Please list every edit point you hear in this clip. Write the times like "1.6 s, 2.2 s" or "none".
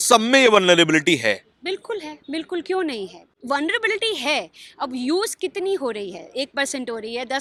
none